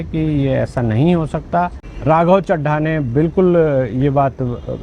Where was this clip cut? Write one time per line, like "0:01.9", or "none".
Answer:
0:01.8